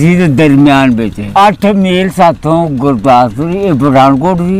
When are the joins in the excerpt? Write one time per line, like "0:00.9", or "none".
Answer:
0:01.2